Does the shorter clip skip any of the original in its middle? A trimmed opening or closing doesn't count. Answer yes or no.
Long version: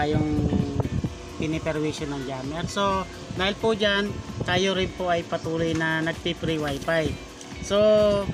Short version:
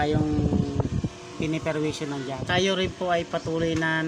yes